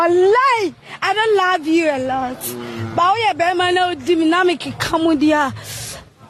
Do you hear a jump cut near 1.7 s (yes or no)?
no